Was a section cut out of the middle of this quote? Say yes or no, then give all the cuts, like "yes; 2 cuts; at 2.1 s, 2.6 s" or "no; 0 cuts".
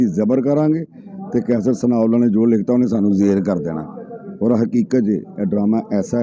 no; 0 cuts